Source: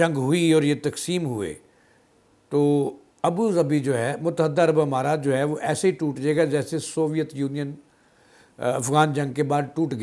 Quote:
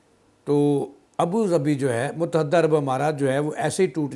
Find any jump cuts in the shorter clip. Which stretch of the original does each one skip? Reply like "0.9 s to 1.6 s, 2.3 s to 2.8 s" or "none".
none